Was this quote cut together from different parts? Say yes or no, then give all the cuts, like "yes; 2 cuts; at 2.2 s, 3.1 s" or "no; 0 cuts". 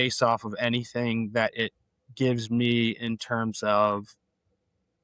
no; 0 cuts